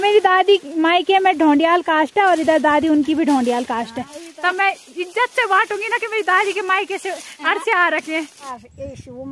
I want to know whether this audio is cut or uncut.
cut